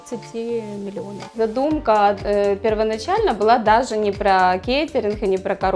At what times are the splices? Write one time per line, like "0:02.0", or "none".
0:01.2